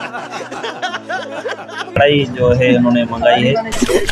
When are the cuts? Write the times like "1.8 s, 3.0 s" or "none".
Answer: 2.0 s